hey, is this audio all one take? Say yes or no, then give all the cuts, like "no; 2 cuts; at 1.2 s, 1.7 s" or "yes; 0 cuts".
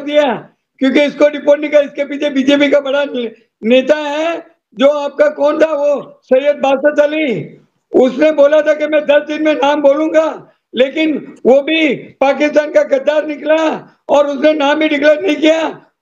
yes; 0 cuts